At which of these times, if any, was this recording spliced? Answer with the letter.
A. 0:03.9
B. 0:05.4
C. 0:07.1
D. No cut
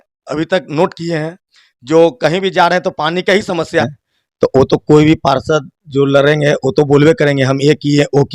A